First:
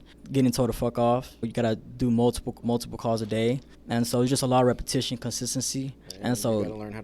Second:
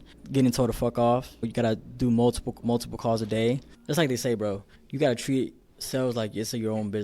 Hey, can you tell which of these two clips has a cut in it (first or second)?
second